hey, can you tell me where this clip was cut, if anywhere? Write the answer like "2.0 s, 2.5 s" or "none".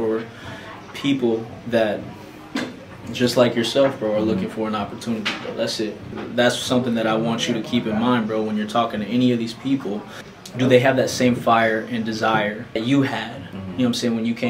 none